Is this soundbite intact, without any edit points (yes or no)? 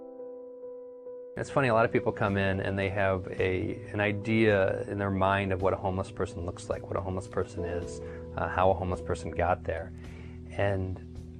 no